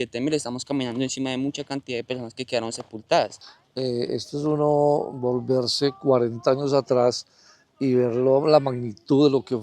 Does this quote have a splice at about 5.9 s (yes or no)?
no